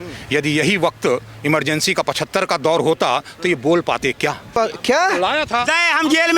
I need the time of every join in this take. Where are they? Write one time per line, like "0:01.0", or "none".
0:04.5

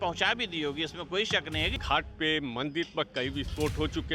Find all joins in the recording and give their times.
0:01.8

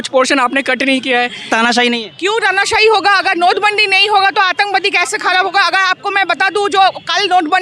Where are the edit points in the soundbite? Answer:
0:01.4

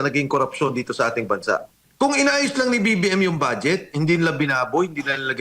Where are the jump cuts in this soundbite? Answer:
0:01.8

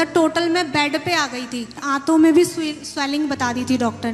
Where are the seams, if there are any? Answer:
0:01.8

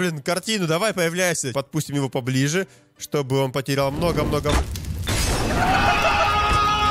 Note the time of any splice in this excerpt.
0:01.5

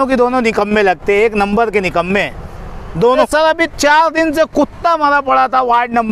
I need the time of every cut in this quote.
0:03.2

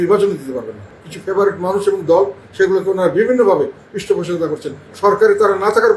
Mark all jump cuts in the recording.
0:01.0

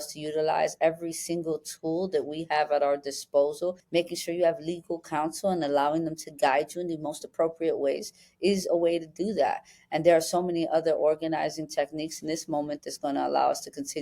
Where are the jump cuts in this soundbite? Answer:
0:03.8

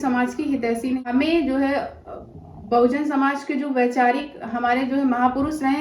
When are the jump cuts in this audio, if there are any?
0:01.0

